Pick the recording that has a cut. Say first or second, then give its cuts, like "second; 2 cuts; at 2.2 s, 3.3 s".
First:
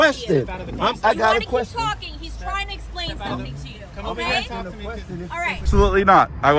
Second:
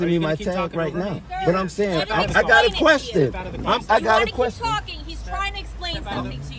first; 1 cut; at 5.7 s